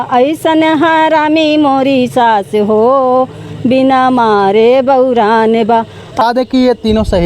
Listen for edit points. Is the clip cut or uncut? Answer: cut